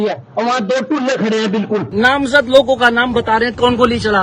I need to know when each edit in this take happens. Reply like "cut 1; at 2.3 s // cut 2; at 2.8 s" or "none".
cut 1; at 1.9 s